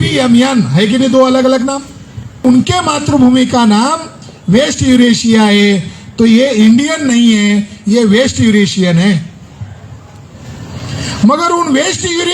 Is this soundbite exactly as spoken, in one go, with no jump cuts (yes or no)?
no